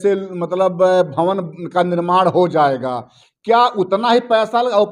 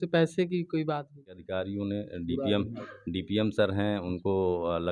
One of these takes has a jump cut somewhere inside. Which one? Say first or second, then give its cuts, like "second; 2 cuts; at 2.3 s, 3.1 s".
second; 1 cut; at 1.4 s